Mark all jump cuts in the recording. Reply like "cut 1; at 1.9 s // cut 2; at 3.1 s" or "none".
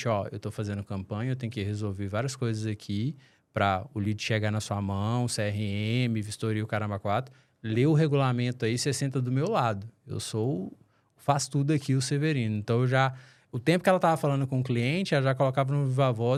none